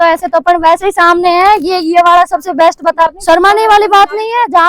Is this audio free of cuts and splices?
no; 1 cut; at 3.2 s

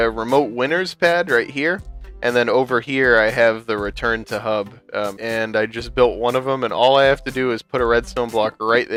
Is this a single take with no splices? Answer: yes; 0 cuts

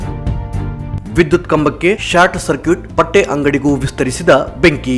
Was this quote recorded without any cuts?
no; 1 cut; at 1.0 s

